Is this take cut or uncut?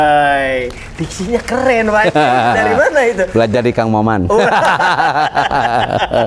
uncut